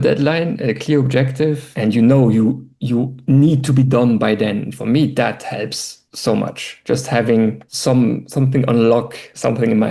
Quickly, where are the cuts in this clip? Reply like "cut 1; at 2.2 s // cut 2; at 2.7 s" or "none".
cut 1; at 1.7 s